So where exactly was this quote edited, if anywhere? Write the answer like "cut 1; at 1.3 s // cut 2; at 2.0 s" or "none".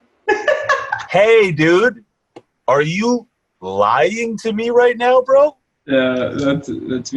cut 1; at 0.9 s